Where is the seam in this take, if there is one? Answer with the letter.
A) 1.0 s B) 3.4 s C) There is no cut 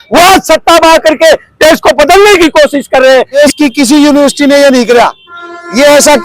B